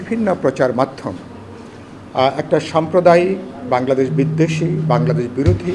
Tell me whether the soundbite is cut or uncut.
uncut